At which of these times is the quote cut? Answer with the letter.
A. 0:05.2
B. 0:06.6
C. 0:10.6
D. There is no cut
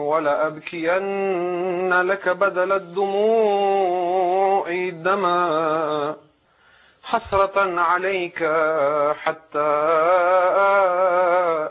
C